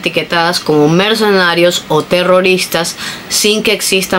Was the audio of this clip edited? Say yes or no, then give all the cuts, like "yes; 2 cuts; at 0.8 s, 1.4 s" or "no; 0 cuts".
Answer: no; 0 cuts